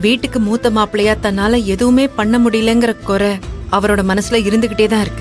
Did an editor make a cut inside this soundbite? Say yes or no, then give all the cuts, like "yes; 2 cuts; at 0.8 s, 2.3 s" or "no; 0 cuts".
yes; 1 cut; at 3.2 s